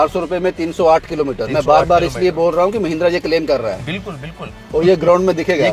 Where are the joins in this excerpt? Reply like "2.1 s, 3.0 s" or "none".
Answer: none